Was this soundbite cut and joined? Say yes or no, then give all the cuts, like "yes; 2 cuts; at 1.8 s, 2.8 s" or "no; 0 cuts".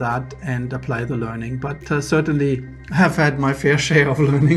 no; 0 cuts